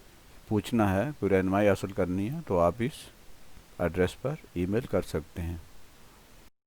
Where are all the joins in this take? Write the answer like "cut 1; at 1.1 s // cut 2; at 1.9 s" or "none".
cut 1; at 5.1 s